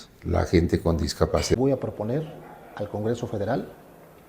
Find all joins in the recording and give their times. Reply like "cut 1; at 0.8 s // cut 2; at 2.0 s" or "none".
cut 1; at 1.5 s

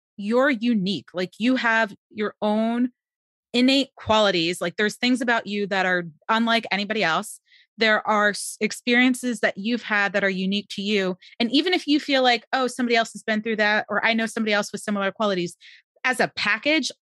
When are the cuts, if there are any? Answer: none

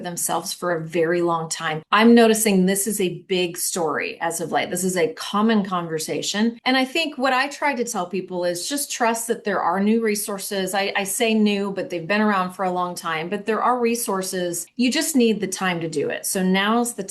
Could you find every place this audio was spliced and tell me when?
cut 1; at 1.7 s // cut 2; at 6.6 s // cut 3; at 14.6 s

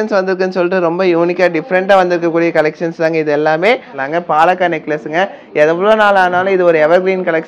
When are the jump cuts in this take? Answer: cut 1; at 4.0 s

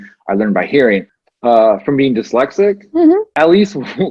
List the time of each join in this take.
cut 1; at 1.2 s // cut 2; at 3.3 s

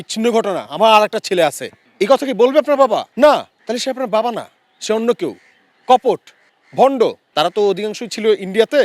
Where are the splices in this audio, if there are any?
cut 1; at 7.2 s

